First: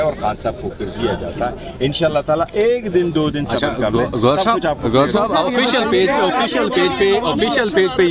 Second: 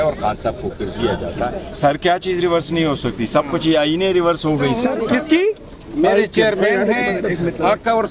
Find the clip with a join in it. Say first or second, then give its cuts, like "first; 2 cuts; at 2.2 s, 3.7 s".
second; 2 cuts; at 1.6 s, 4.9 s